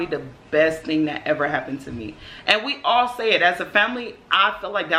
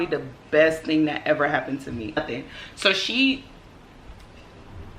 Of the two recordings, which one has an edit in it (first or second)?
second